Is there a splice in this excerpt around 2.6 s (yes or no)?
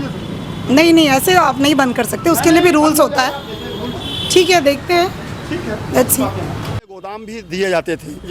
no